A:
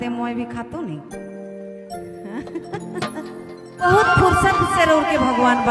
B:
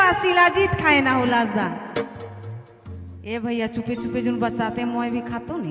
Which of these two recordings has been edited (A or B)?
A